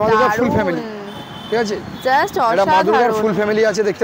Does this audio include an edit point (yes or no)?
no